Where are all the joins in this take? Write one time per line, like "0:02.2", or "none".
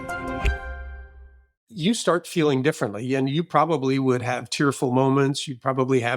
0:01.6